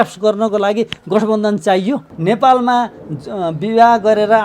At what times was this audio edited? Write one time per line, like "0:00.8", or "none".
0:02.1